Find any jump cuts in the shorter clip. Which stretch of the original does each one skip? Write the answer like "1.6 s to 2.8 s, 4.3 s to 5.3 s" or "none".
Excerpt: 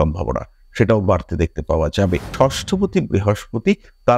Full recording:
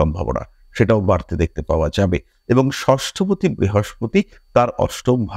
2.3 s to 2.8 s